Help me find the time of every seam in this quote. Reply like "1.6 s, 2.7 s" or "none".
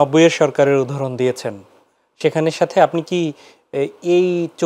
none